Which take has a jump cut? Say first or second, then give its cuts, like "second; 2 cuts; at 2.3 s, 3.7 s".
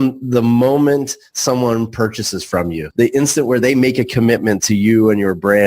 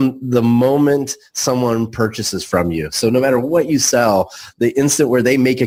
first; 1 cut; at 2.8 s